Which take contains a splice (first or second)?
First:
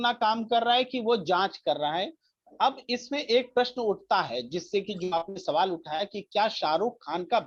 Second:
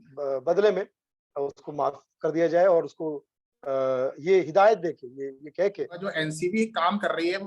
second